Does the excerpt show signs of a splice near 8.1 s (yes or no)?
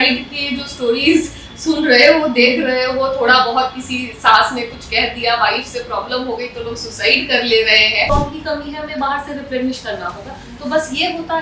yes